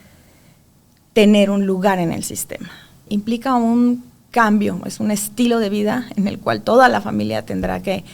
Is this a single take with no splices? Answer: no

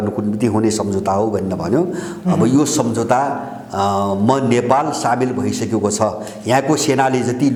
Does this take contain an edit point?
no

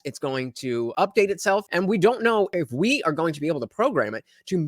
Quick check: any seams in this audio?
yes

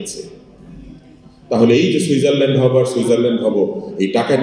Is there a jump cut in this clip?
no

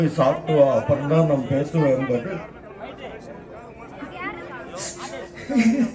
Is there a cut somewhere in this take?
no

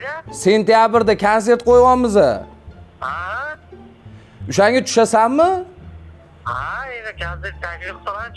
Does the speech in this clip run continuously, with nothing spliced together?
yes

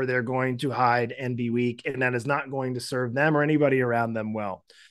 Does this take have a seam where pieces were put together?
no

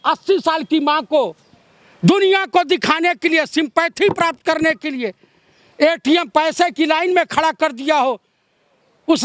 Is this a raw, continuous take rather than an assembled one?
yes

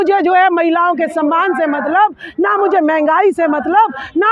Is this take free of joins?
yes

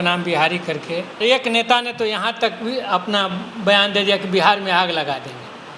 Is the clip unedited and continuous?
no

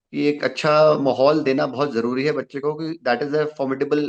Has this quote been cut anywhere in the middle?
no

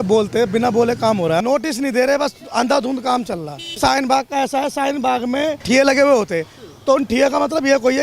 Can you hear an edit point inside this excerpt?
yes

